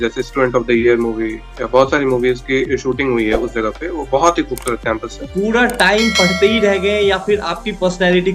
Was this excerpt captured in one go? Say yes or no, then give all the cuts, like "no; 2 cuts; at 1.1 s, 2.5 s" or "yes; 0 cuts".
no; 1 cut; at 5.1 s